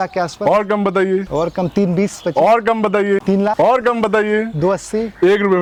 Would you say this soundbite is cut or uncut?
uncut